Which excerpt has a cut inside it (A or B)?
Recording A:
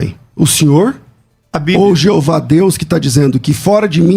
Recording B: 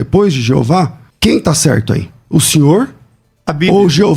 B